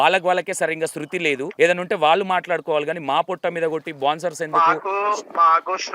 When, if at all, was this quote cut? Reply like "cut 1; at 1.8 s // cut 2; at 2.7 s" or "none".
cut 1; at 1.5 s

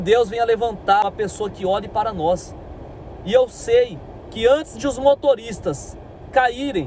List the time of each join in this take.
cut 1; at 1.0 s

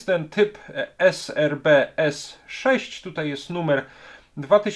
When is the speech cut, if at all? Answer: none

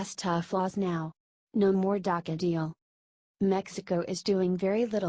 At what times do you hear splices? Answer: cut 1; at 3.5 s

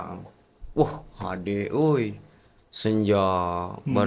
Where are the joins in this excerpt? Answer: none

